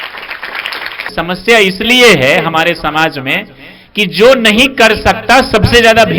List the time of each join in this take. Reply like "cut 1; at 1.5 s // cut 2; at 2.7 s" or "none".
cut 1; at 1.1 s

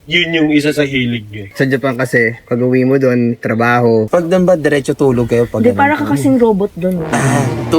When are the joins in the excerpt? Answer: cut 1; at 1.4 s // cut 2; at 4.1 s

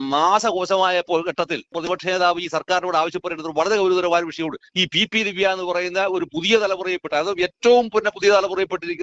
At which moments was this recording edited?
cut 1; at 1.8 s // cut 2; at 4.6 s

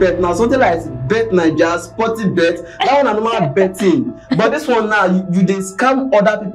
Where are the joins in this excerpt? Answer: none

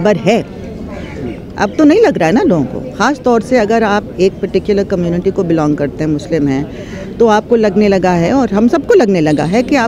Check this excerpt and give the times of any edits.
none

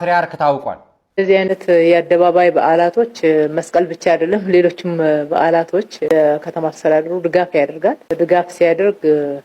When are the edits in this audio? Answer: cut 1; at 1.0 s

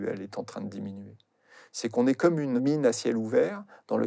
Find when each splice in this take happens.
cut 1; at 2.6 s

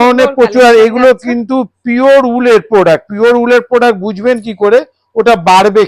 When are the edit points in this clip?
none

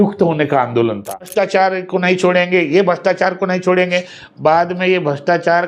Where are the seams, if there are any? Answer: cut 1; at 1.2 s

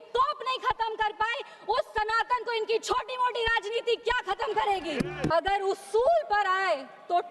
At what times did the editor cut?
cut 1; at 5.3 s

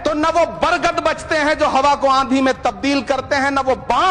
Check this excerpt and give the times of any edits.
none

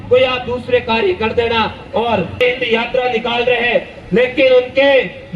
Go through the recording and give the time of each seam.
cut 1; at 2.4 s

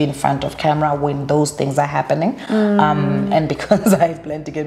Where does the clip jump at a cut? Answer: none

